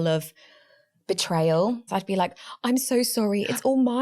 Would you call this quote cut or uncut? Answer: cut